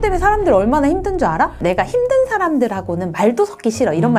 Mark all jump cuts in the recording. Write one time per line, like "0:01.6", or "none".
0:01.6